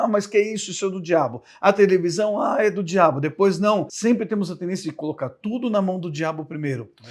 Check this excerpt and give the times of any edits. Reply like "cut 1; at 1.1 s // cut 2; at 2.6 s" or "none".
cut 1; at 3.9 s